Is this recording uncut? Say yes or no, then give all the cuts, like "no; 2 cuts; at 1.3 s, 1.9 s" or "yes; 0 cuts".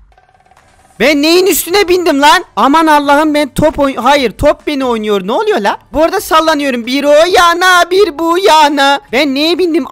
yes; 0 cuts